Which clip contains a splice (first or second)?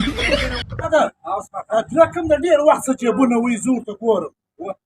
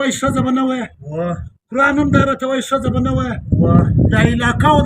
first